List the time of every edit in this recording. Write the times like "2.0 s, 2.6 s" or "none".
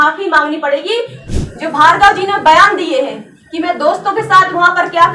1.2 s

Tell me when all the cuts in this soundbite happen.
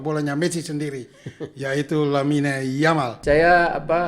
3.1 s

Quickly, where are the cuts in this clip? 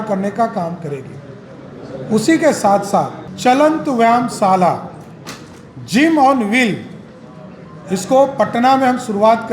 none

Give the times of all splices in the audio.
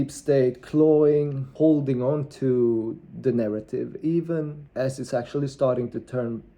1.5 s, 4.6 s

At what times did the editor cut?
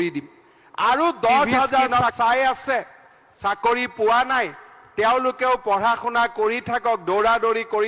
2.0 s

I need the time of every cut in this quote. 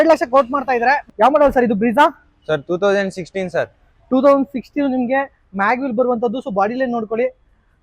1.1 s

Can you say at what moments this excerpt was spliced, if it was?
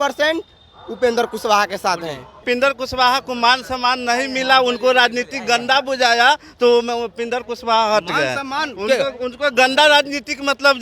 2.3 s

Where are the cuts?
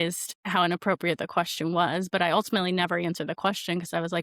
none

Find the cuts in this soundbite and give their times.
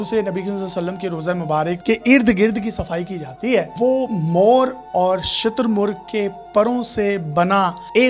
1.8 s, 3.7 s

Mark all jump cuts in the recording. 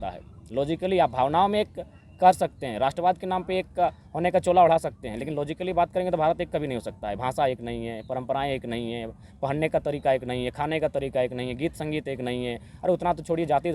none

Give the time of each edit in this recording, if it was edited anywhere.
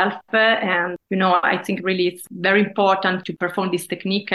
0.9 s, 2.2 s, 3.2 s

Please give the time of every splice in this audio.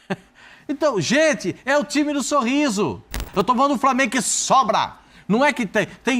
3.3 s

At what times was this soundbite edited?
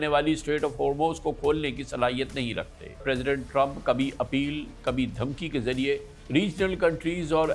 3.0 s

